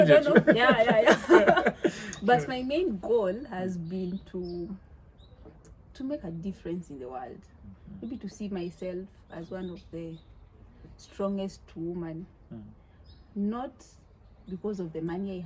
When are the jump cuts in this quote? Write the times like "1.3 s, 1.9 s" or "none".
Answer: none